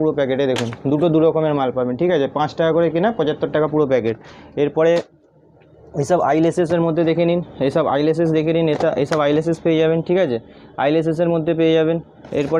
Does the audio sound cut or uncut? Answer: uncut